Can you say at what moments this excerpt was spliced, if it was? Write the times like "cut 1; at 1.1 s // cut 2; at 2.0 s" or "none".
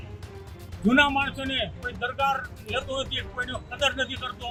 none